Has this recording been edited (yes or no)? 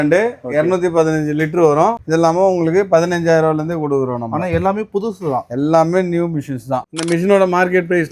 yes